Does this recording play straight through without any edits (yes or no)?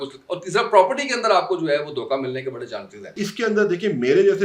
no